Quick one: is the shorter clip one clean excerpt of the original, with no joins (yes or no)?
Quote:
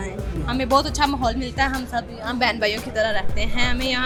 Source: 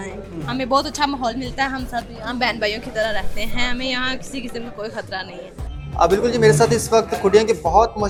yes